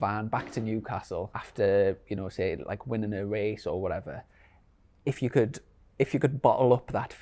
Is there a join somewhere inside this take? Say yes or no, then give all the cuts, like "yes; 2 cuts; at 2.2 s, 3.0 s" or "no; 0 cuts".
yes; 1 cut; at 1.4 s